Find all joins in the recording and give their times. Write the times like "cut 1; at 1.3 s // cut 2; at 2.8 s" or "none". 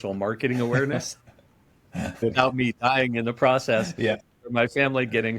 cut 1; at 2.2 s // cut 2; at 4.2 s